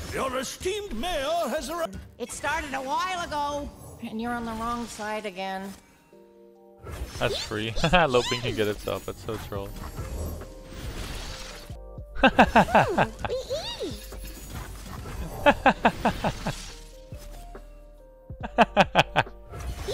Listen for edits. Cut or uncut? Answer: cut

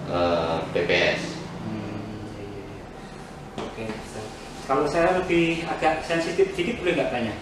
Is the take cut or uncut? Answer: uncut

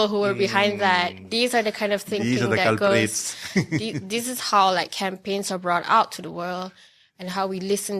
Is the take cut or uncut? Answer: uncut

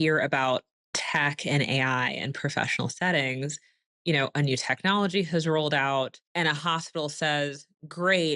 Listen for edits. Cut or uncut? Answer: cut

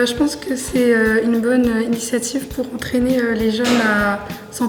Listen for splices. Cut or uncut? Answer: uncut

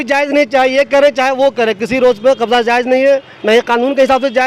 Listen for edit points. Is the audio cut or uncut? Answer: uncut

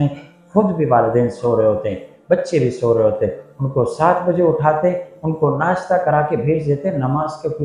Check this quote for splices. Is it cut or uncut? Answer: uncut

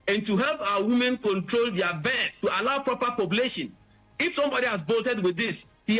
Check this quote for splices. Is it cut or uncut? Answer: cut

